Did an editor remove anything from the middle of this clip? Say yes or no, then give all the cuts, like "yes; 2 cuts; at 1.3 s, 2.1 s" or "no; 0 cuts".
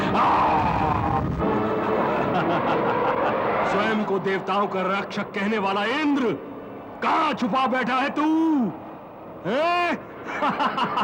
yes; 1 cut; at 2.0 s